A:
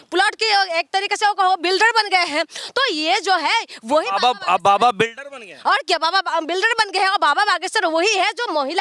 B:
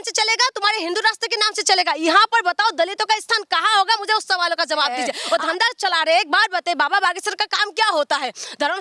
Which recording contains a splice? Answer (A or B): B